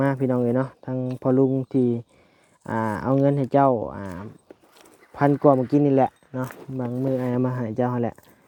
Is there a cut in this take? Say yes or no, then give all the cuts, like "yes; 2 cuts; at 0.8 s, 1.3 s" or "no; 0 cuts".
no; 0 cuts